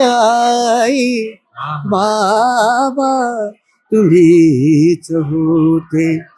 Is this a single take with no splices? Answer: yes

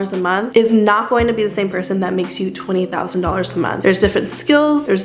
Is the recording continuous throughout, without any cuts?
yes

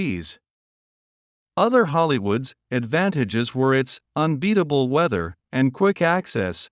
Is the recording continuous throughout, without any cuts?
yes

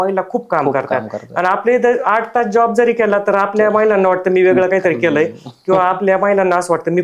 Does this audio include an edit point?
no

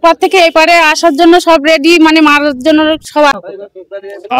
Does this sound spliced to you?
yes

